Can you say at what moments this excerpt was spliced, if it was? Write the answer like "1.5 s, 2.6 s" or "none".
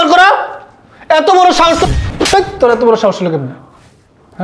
1.9 s